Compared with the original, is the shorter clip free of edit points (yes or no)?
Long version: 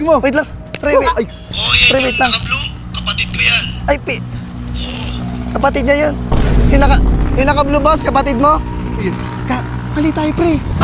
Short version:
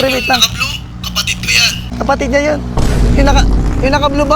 no